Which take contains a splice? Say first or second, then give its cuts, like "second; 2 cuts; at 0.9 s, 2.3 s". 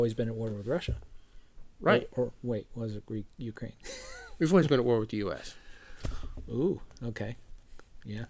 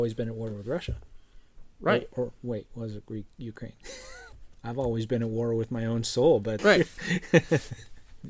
second; 2 cuts; at 4.3 s, 6.5 s